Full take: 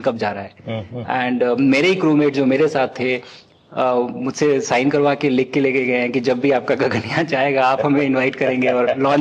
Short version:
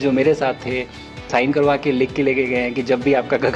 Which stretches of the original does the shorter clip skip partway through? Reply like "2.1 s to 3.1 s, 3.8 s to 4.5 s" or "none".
3.6 s to 4.6 s